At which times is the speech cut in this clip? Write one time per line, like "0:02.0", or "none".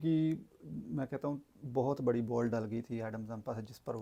none